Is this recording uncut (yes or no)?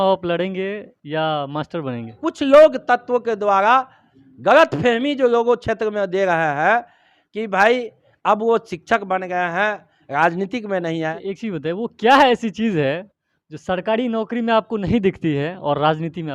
no